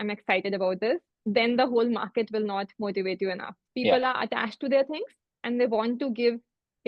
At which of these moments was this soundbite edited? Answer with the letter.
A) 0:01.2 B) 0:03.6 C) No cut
B